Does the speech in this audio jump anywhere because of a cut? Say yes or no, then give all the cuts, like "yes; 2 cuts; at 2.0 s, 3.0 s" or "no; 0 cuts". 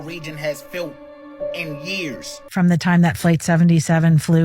yes; 1 cut; at 2.5 s